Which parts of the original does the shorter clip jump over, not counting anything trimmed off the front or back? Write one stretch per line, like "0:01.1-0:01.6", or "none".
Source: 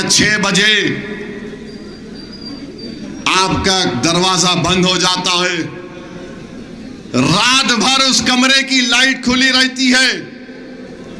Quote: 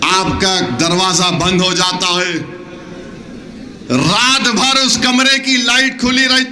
none

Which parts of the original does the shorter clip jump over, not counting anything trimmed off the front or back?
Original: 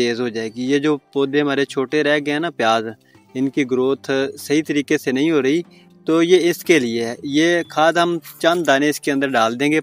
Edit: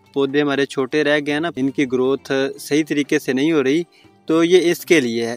0:02.5-0:03.3

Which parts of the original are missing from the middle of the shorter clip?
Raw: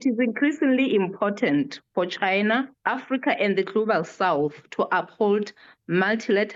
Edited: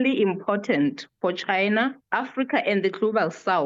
none

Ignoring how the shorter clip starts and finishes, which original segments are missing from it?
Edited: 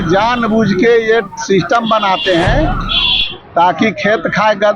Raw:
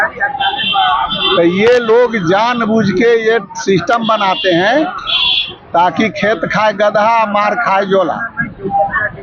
none

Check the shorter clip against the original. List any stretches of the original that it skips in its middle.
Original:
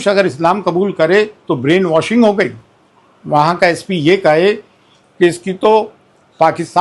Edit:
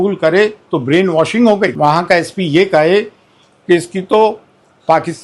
0:02.5-0:03.3

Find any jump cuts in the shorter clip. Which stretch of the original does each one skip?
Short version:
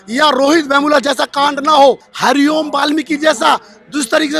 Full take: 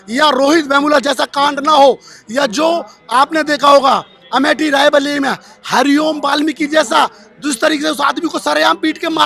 0:02.1-0:05.6

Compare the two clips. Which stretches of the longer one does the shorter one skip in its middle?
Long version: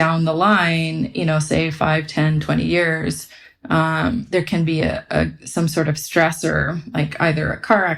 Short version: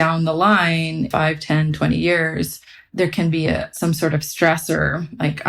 0:01.1-0:01.8
0:03.6-0:04.2
0:05.0-0:05.4

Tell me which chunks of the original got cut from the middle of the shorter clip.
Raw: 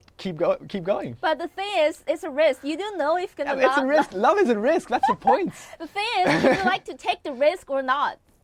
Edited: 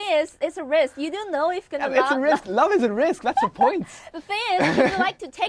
none

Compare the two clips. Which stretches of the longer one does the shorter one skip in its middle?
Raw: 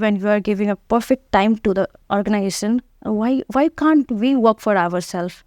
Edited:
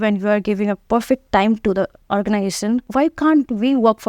0:02.9-0:03.5

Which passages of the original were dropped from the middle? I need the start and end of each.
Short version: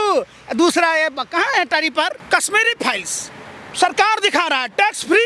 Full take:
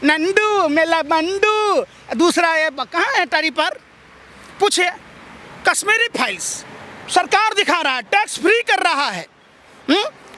0:03.8-0:05.5

